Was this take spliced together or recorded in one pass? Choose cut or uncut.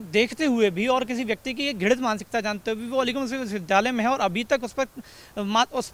uncut